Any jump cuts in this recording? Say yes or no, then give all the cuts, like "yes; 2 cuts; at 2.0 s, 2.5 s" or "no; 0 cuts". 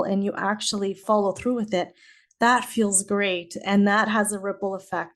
yes; 1 cut; at 1.0 s